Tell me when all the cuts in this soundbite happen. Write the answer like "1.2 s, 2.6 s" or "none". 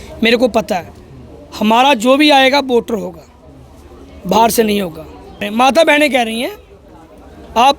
5.5 s